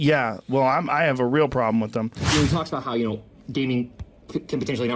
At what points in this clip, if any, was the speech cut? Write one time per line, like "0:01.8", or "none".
0:02.2